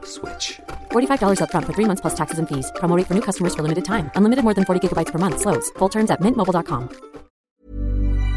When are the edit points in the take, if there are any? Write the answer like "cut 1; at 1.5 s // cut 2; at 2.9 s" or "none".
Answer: cut 1; at 7.4 s